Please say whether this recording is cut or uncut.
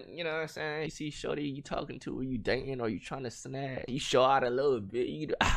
cut